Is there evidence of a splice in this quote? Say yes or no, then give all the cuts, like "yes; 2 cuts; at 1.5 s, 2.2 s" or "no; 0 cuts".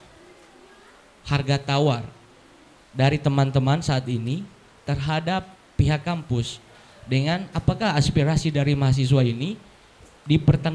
no; 0 cuts